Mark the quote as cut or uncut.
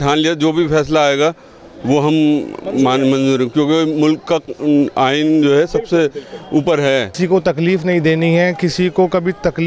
cut